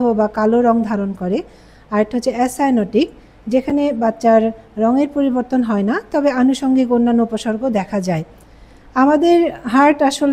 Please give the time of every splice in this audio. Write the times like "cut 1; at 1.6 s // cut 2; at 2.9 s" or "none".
none

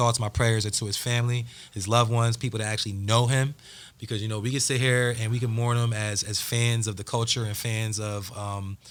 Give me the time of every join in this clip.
none

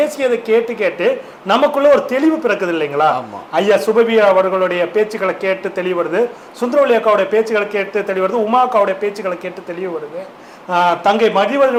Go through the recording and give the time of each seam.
none

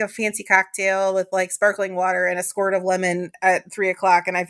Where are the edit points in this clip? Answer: none

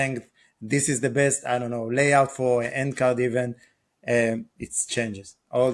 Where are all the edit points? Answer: none

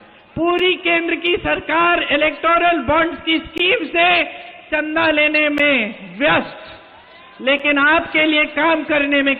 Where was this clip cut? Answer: none

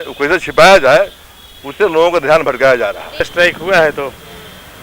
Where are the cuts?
cut 1; at 3.3 s

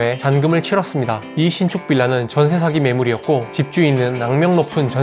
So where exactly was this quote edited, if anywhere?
cut 1; at 1.3 s

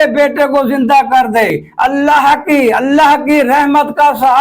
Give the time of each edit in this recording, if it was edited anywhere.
cut 1; at 1.6 s

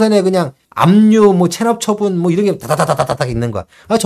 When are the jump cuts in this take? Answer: none

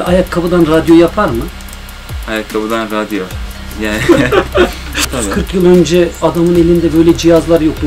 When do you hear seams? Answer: cut 1; at 5.0 s

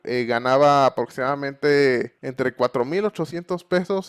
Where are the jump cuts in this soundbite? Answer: cut 1; at 2.2 s

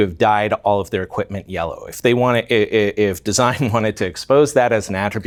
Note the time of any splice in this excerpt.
none

